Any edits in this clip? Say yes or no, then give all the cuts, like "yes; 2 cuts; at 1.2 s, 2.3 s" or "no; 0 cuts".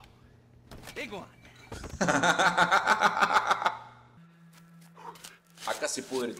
yes; 1 cut; at 4.2 s